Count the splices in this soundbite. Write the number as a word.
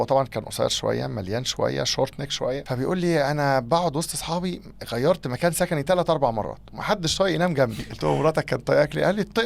two